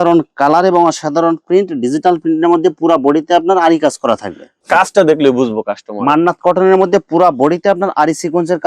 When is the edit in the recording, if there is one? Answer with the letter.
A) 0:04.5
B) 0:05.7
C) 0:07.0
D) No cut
A